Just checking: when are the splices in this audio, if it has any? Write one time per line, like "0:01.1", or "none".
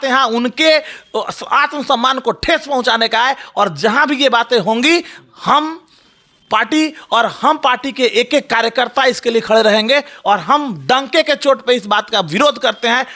none